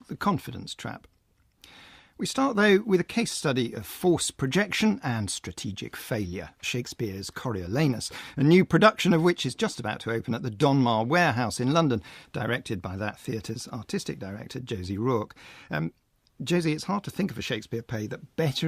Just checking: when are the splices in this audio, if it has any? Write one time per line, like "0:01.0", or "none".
0:16.6

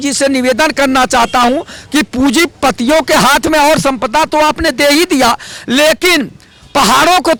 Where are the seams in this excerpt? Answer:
none

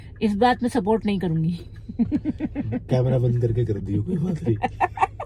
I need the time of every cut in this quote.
none

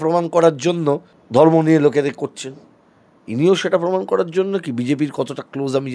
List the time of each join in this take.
0:01.1

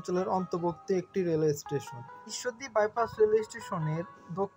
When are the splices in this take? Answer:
none

